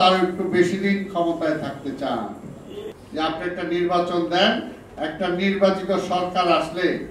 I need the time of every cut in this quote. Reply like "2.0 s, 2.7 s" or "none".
3.0 s